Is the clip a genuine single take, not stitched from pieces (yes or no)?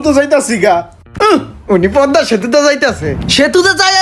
no